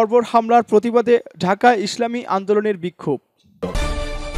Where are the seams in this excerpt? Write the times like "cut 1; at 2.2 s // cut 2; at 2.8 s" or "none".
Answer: cut 1; at 3.5 s